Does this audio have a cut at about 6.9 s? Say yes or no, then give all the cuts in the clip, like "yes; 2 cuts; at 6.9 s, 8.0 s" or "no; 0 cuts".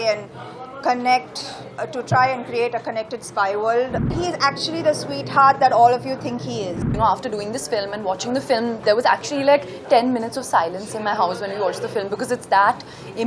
yes; 2 cuts; at 4.1 s, 6.9 s